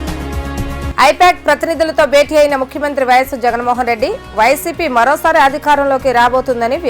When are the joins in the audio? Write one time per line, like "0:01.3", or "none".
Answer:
0:00.9